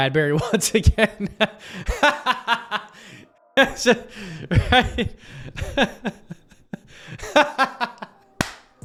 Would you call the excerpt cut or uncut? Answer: uncut